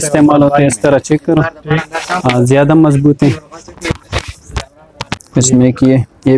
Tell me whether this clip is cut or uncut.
cut